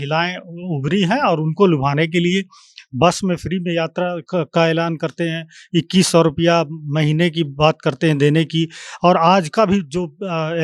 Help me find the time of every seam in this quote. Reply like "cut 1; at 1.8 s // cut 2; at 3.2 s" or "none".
none

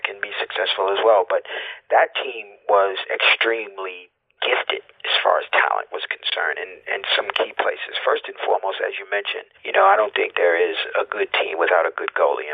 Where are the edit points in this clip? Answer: none

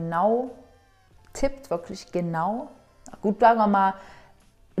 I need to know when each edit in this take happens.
none

